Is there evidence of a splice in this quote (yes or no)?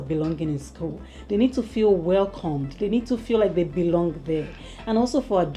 no